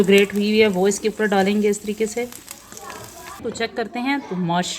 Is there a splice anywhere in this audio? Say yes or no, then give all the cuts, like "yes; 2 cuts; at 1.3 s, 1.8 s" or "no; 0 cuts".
yes; 1 cut; at 3.4 s